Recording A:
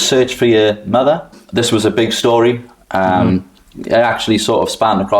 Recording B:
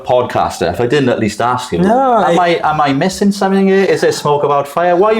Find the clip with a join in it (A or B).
A